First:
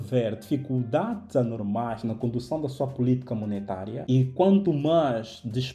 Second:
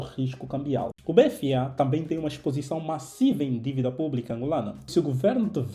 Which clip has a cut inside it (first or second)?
second